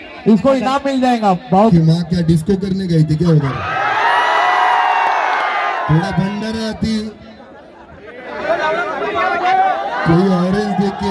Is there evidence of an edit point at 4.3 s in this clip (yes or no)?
no